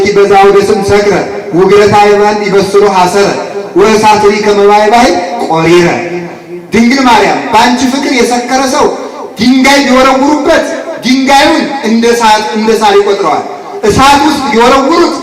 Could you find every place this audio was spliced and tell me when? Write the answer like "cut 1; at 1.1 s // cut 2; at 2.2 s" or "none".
none